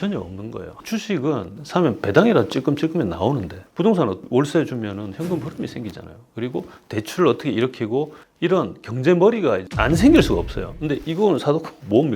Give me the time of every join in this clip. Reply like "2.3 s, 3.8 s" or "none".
0.8 s, 3.6 s, 4.2 s, 8.2 s